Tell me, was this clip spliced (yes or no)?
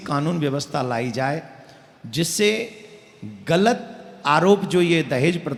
no